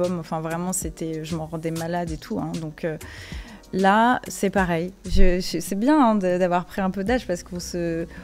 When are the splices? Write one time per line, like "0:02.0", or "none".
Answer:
none